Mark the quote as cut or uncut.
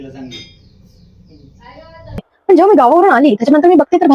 cut